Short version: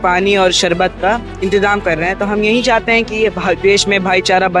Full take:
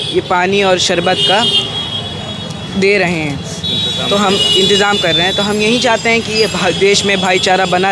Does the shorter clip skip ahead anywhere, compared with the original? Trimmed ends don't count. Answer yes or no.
yes